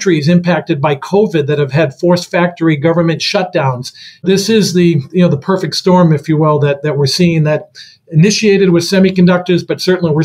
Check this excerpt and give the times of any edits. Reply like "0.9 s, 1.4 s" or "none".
4.2 s